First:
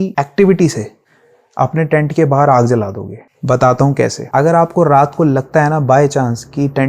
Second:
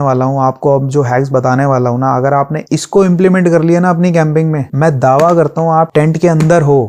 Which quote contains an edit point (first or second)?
first